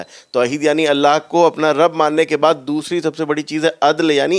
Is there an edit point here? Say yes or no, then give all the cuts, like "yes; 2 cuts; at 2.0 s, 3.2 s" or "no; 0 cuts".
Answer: no; 0 cuts